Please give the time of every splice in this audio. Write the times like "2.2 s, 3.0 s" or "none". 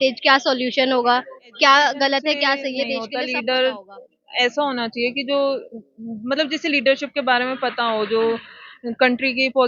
3.1 s